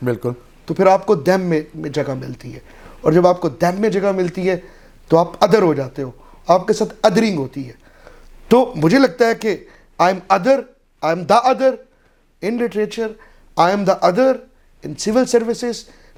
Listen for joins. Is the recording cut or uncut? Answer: uncut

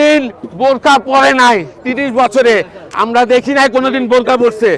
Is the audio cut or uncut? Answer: uncut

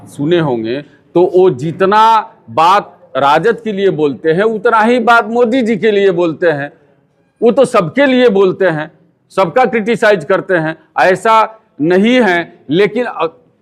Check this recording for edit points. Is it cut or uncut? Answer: uncut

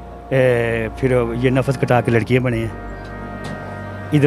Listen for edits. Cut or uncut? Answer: uncut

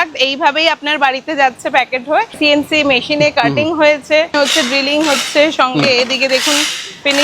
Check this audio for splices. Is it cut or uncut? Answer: cut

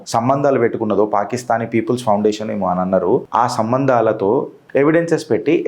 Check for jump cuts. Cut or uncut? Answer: cut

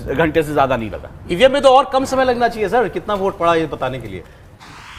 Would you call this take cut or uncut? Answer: uncut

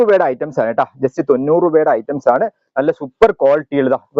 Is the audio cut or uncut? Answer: uncut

